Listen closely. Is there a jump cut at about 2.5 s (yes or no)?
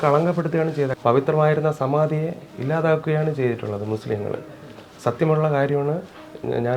no